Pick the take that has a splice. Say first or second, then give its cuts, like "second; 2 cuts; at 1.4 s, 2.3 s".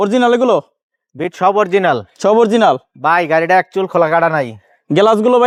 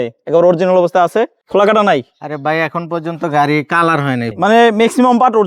second; 2 cuts; at 1.4 s, 4.3 s